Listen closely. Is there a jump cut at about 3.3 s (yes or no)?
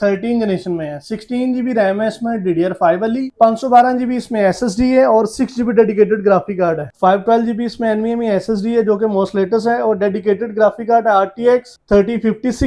yes